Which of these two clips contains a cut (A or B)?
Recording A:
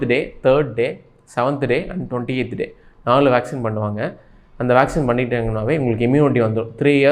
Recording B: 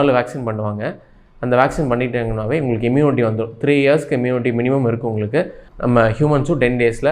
B